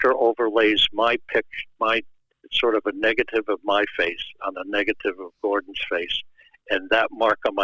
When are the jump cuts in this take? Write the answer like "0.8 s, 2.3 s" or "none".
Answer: none